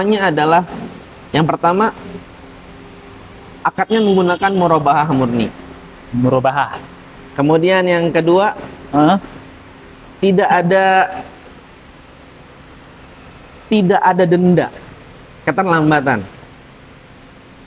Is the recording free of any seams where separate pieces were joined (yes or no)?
yes